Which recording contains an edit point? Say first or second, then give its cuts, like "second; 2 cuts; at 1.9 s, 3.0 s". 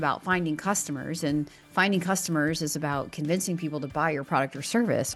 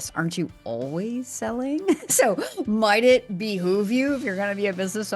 second; 1 cut; at 2.0 s